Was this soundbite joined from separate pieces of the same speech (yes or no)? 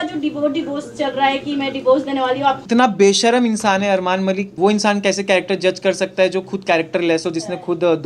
yes